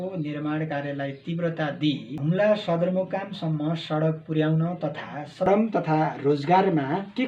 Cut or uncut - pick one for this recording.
cut